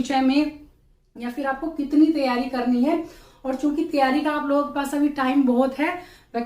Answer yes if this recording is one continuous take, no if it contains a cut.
yes